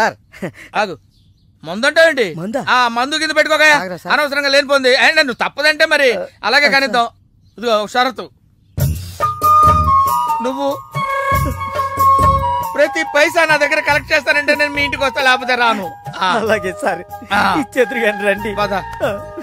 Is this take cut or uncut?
uncut